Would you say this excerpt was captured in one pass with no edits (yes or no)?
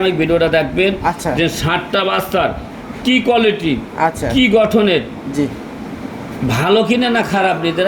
yes